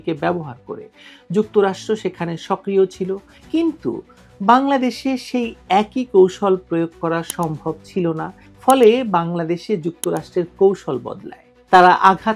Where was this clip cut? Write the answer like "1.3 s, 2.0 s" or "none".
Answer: 3.3 s, 8.4 s

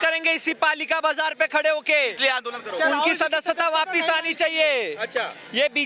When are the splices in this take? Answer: none

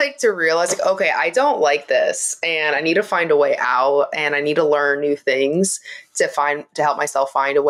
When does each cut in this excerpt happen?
none

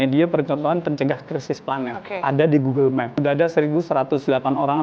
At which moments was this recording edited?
2.0 s, 3.1 s

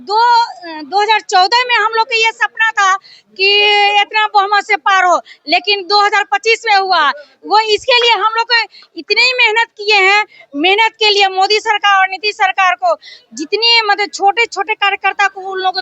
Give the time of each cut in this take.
none

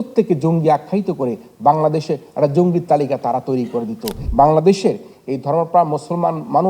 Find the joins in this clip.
4.2 s

